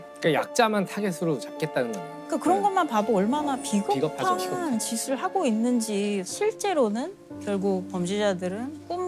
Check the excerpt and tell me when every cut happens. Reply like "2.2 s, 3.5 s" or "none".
6.3 s